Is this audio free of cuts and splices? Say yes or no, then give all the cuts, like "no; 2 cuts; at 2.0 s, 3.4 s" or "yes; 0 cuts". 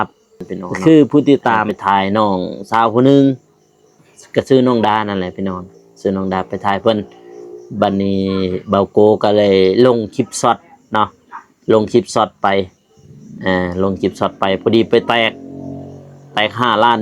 no; 1 cut; at 1.5 s